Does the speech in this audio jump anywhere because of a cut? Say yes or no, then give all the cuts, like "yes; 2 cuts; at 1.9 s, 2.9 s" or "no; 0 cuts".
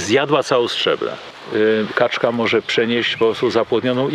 yes; 1 cut; at 1.3 s